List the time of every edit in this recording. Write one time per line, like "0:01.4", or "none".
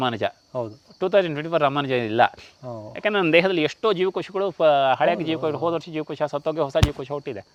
none